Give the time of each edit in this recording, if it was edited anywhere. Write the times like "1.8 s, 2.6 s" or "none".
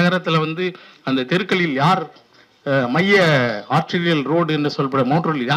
none